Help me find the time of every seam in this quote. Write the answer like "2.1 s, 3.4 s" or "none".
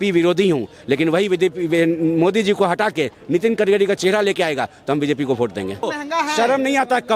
5.9 s